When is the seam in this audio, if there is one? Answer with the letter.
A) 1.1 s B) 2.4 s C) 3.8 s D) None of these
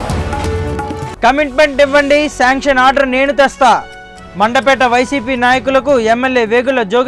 D